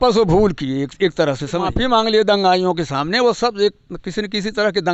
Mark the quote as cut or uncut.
cut